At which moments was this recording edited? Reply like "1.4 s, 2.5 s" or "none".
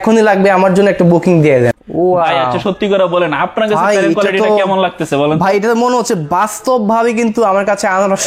1.7 s

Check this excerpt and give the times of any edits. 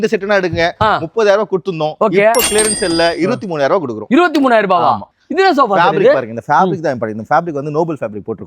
5.1 s

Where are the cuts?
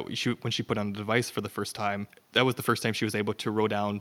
2.2 s

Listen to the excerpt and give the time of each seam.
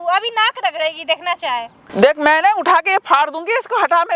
1.8 s

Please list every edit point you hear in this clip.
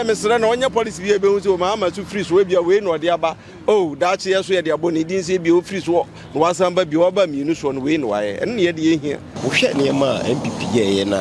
9.3 s

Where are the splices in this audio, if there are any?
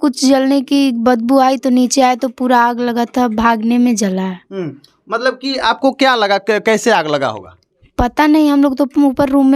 none

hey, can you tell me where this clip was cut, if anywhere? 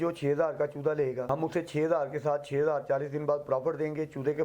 1.2 s

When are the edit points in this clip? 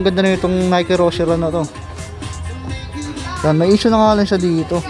none

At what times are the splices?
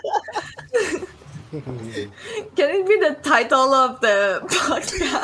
2.1 s

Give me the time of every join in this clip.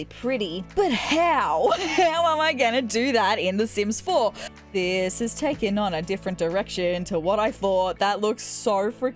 4.5 s

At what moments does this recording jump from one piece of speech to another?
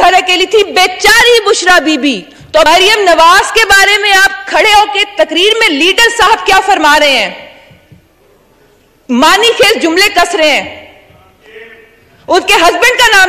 2.7 s

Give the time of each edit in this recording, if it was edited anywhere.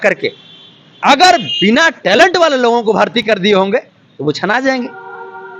none

